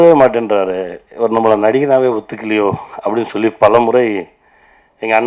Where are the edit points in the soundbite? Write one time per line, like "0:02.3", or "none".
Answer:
none